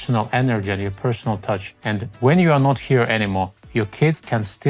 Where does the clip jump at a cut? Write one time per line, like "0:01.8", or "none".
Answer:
0:01.7
0:03.6